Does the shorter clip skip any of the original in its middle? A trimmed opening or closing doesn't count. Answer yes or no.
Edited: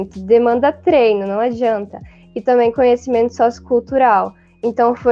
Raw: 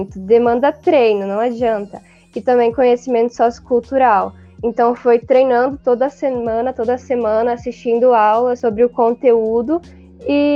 no